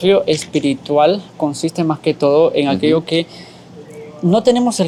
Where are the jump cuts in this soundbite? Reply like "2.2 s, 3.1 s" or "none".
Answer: none